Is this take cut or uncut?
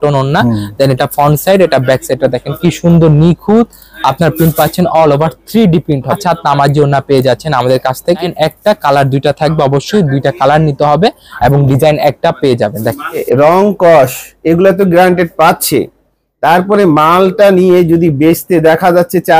cut